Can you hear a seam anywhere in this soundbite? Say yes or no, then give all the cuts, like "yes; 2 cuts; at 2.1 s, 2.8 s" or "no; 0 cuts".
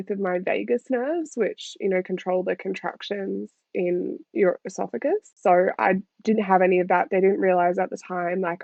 no; 0 cuts